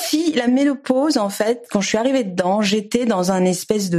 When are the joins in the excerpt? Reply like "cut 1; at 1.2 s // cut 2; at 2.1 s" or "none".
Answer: cut 1; at 1.6 s